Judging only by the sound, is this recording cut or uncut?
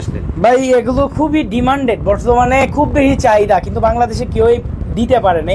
uncut